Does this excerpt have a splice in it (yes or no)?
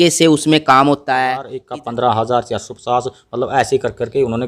yes